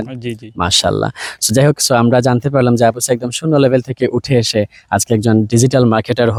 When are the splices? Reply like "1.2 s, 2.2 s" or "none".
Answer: none

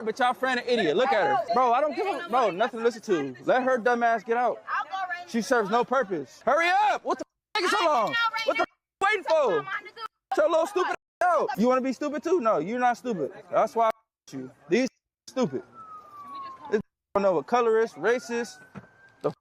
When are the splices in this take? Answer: 1.4 s, 6.3 s, 11.5 s

